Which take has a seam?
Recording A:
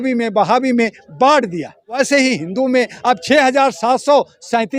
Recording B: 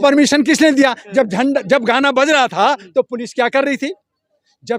A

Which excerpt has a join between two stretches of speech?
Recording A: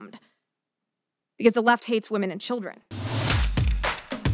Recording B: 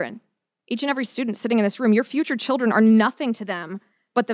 A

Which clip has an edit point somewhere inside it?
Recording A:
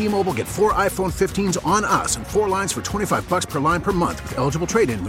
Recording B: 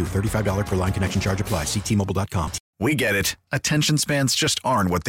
B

